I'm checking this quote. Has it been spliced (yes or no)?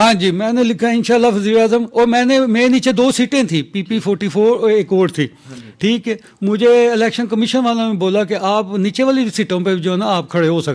no